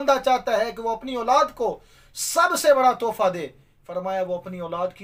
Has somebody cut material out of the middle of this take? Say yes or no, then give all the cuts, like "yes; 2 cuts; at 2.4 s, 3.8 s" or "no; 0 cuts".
no; 0 cuts